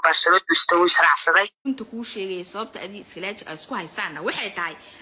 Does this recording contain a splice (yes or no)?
yes